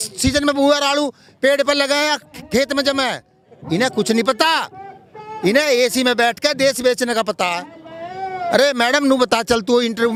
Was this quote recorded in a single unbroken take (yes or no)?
yes